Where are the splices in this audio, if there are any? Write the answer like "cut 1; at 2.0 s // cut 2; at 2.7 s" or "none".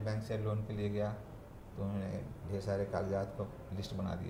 none